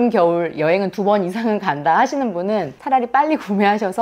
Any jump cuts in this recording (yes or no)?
yes